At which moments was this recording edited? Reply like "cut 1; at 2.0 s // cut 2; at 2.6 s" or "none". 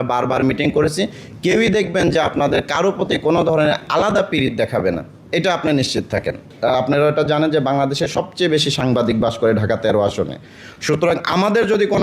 cut 1; at 6.5 s